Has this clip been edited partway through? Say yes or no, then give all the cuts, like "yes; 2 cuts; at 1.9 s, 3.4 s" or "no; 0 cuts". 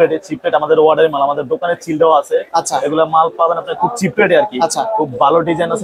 no; 0 cuts